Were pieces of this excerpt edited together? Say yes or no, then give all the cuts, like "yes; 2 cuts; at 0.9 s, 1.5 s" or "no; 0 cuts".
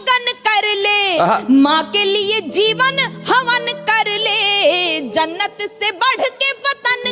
no; 0 cuts